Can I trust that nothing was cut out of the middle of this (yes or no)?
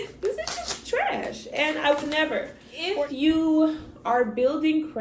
no